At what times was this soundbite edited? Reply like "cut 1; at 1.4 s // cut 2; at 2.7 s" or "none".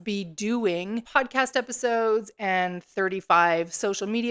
cut 1; at 1.0 s